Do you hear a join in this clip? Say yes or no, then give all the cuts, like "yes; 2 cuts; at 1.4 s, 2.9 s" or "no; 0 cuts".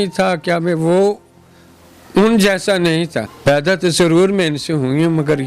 yes; 1 cut; at 3.3 s